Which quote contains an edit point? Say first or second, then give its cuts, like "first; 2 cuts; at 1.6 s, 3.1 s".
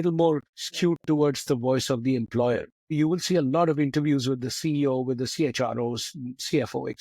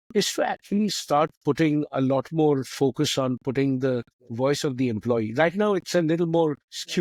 first; 1 cut; at 2.9 s